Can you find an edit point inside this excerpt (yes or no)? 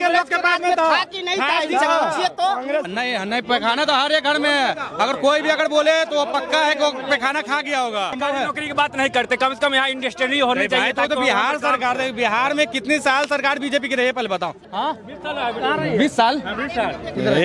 yes